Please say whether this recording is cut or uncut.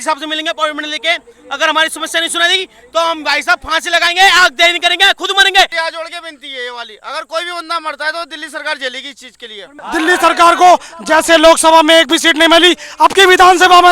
cut